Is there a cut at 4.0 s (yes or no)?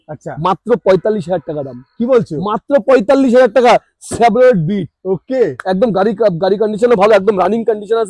no